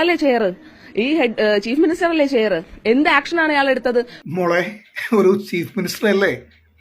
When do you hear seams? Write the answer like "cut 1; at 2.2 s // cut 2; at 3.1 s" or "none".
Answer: none